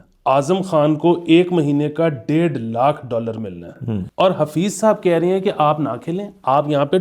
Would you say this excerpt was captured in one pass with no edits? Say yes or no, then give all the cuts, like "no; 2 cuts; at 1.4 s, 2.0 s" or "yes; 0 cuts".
no; 1 cut; at 4.0 s